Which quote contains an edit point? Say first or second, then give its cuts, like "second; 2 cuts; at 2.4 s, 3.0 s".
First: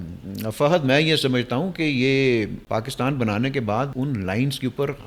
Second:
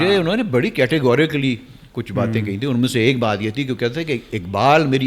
first; 2 cuts; at 2.6 s, 3.9 s